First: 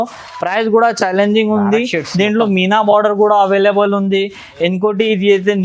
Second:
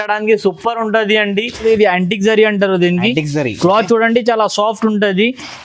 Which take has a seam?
second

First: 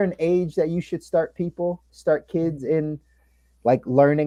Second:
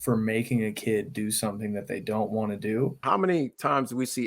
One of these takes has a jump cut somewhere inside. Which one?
second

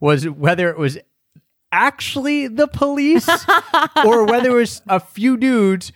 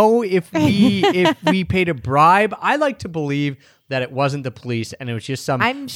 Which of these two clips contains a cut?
first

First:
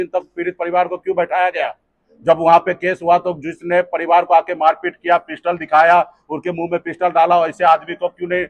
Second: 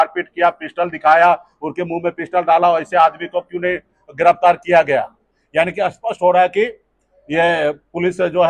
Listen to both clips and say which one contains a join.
second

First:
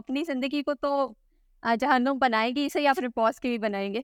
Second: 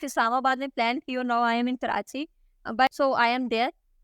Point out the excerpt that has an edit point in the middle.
second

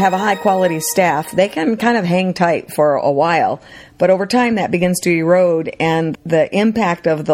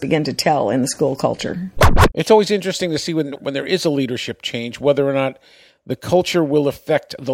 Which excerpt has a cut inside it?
second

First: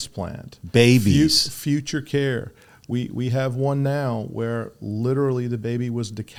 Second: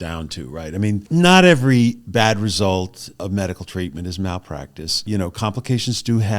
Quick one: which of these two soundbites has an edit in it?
second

